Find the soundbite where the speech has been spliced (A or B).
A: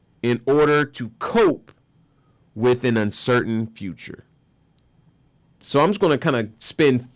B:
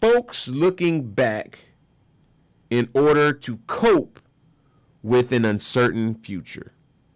A